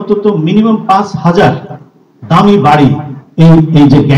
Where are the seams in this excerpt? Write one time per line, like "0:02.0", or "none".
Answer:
none

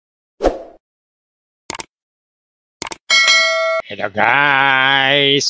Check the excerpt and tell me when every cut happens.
0:03.8

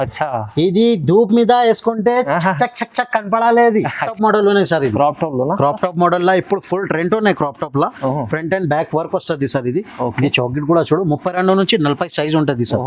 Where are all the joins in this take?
0:04.1

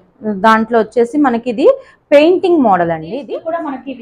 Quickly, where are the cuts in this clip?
0:03.1

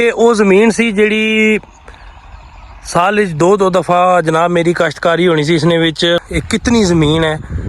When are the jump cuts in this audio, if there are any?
0:06.3

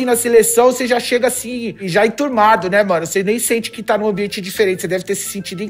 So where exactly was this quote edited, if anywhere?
0:01.8

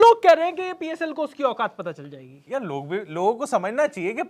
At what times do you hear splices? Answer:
none

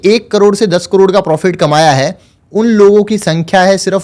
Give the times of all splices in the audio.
none

